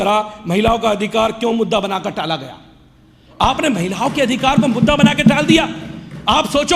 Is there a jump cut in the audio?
no; 0 cuts

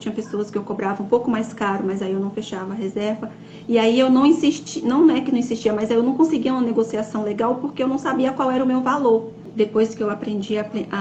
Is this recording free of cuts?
yes; 0 cuts

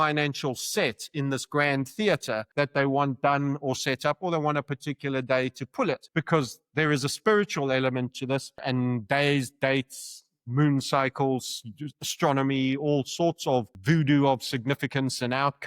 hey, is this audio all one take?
no; 4 cuts; at 2.5 s, 6.0 s, 8.6 s, 13.7 s

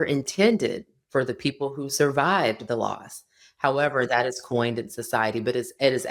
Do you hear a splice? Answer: no; 0 cuts

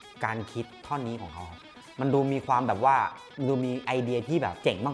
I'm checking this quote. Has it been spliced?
no; 0 cuts

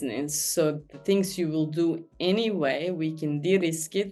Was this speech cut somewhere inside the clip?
no; 0 cuts

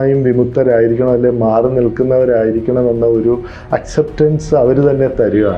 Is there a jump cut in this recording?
no; 0 cuts

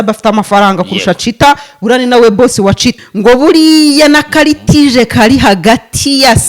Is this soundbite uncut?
no; 1 cut; at 3.1 s

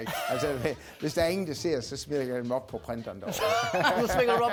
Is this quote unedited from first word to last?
yes; 0 cuts

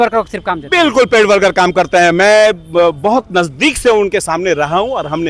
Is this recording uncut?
yes; 0 cuts

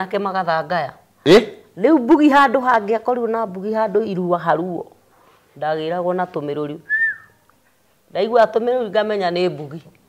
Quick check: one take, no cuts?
yes; 0 cuts

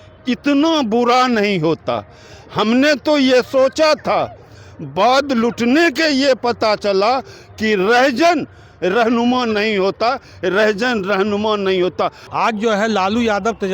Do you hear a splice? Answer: yes; 1 cut; at 12.2 s

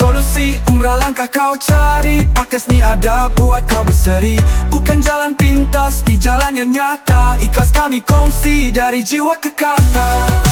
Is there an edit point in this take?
no; 0 cuts

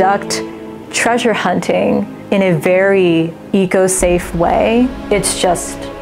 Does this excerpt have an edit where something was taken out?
yes; 3 cuts; at 2.2 s, 3.4 s, 5.0 s

